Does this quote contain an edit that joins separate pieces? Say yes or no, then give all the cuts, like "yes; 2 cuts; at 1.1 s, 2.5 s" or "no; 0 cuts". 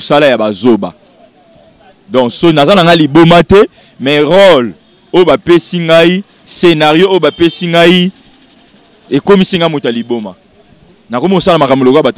no; 0 cuts